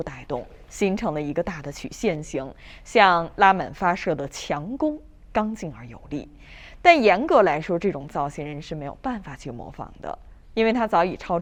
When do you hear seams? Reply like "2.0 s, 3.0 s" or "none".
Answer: none